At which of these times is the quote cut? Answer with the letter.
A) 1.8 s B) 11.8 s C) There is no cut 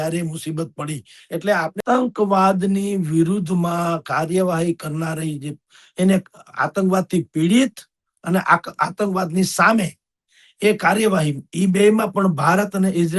A